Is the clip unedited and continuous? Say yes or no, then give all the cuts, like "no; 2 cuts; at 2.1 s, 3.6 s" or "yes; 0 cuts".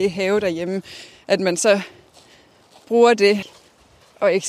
no; 1 cut; at 3.6 s